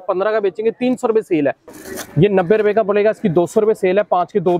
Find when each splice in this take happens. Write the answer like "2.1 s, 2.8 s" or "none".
1.7 s